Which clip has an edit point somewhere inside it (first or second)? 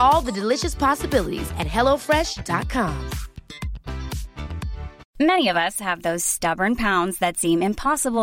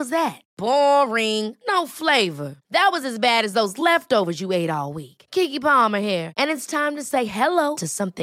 first